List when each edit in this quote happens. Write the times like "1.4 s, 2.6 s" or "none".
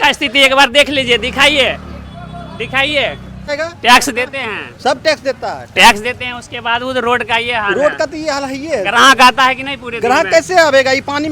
3.5 s